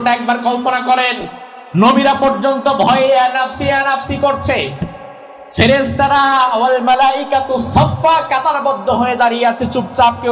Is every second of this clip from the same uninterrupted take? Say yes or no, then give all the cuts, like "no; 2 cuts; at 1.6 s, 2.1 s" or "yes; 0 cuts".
no; 1 cut; at 1.7 s